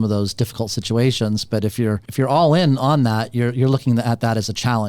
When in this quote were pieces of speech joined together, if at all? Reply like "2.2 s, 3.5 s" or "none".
2.0 s